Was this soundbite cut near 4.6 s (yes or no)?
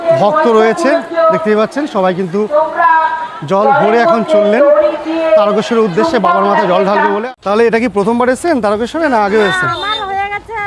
no